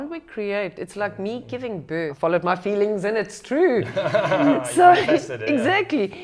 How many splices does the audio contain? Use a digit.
1